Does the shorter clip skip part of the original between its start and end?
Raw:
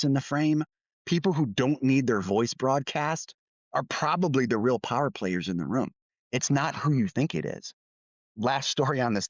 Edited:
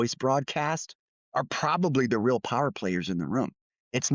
no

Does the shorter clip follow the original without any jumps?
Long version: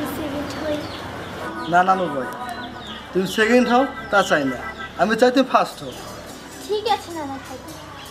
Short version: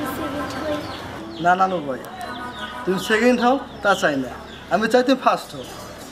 no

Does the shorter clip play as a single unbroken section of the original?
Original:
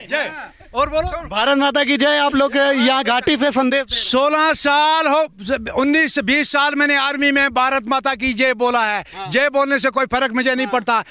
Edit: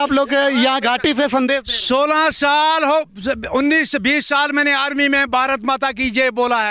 yes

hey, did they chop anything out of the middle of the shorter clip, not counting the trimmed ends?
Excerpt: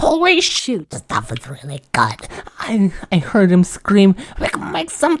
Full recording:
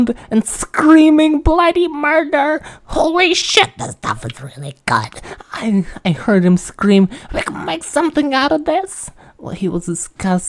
no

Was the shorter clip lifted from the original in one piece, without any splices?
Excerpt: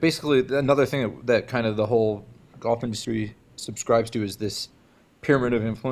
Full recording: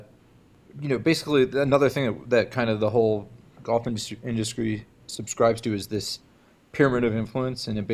no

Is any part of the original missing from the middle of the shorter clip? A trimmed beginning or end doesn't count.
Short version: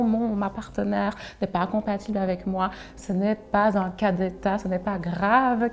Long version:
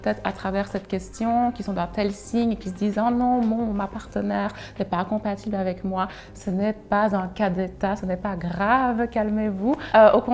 no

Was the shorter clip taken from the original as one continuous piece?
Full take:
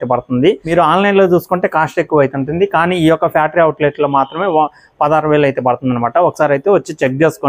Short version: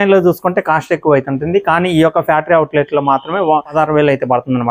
no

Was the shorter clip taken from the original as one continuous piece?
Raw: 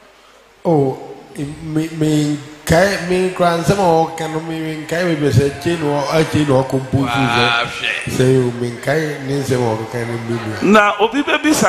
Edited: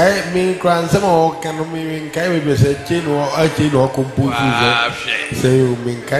yes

